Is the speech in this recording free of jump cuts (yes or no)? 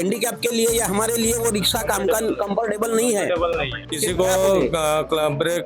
no